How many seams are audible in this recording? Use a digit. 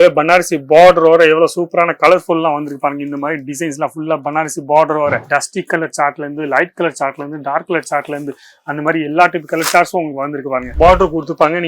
2